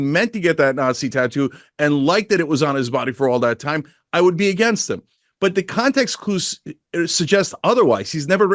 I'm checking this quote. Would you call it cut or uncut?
uncut